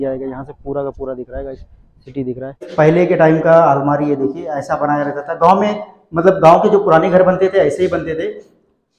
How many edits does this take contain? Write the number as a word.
one